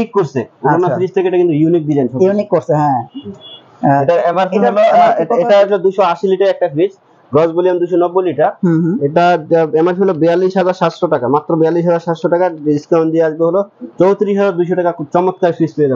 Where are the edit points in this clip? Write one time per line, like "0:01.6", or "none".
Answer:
none